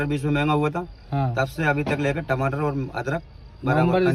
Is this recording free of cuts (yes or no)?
yes